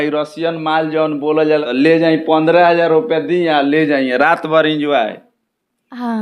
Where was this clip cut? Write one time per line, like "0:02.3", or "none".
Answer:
0:01.7